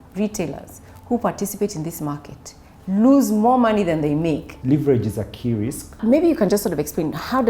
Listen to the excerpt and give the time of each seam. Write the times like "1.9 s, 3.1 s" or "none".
4.5 s, 6.0 s